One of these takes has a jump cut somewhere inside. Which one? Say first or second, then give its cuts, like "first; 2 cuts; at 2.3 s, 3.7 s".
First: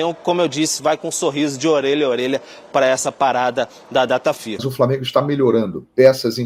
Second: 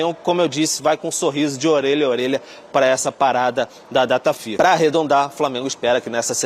first; 1 cut; at 4.6 s